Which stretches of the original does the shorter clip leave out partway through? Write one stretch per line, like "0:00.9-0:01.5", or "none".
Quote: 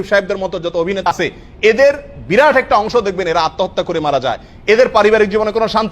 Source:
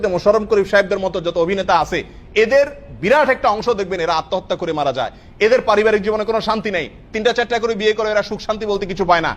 0:01.7-0:01.8